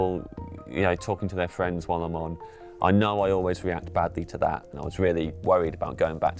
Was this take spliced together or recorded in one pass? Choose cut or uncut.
cut